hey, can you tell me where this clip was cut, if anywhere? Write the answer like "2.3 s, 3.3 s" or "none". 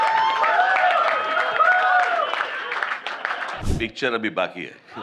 3.6 s